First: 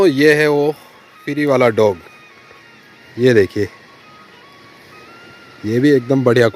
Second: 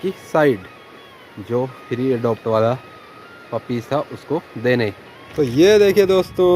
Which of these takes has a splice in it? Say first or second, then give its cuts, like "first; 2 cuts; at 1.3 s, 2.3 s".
second; 1 cut; at 5.2 s